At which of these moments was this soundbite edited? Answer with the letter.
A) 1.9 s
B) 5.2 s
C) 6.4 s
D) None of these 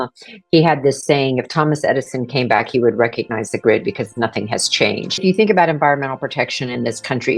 B